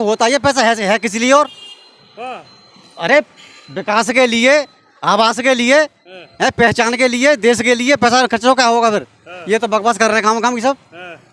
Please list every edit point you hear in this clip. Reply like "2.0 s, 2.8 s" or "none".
none

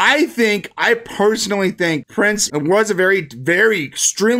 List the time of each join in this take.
2.3 s

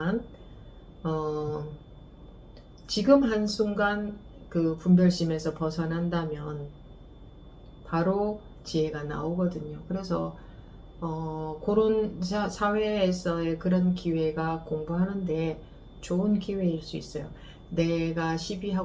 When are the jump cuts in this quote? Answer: none

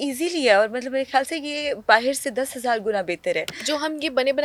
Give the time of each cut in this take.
none

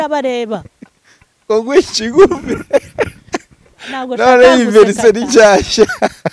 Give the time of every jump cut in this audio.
none

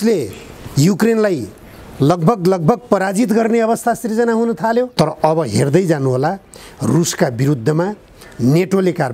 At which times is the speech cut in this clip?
4.9 s

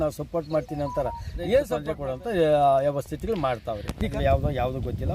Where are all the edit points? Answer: 1.9 s, 4.1 s

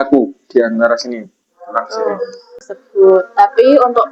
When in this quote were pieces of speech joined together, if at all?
2.7 s

